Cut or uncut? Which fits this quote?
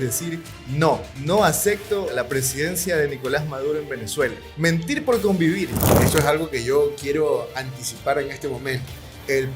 cut